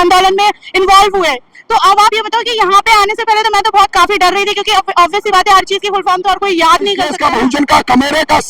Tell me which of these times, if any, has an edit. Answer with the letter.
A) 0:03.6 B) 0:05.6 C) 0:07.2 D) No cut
C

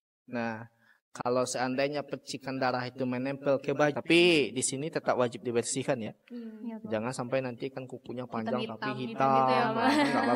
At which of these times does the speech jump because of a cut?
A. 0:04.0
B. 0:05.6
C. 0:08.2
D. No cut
A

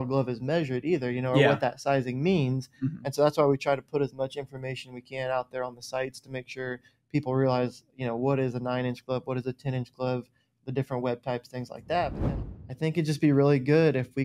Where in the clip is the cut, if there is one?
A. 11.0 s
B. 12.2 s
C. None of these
B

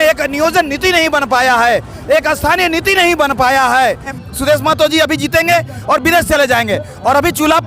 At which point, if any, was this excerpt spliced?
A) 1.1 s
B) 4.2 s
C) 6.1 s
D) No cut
B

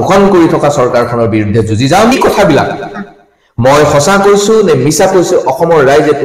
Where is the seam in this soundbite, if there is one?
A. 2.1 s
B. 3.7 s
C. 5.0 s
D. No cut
A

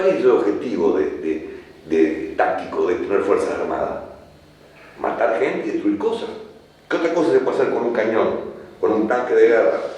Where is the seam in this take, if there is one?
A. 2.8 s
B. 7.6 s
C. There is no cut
C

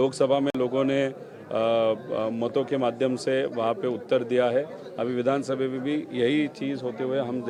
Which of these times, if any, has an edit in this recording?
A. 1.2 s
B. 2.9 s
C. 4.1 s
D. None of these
D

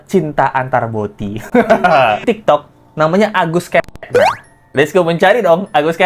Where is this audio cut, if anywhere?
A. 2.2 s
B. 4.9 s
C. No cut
A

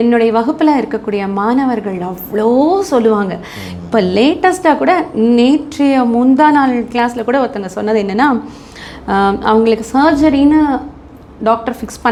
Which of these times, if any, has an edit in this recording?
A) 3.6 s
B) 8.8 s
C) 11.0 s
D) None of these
D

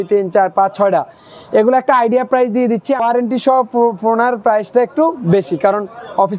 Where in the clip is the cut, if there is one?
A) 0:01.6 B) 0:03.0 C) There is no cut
B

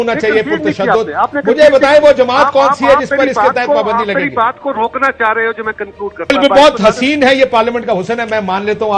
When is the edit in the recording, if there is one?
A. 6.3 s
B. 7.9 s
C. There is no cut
A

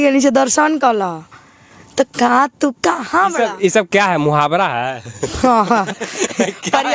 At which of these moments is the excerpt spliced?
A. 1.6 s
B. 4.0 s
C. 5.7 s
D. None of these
D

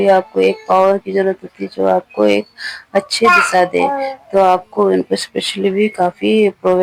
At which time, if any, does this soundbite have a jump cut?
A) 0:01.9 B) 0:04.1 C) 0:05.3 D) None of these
D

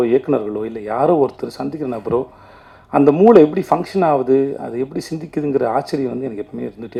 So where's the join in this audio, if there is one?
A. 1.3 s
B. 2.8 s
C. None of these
C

